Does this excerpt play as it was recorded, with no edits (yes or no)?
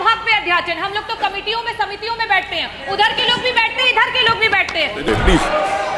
no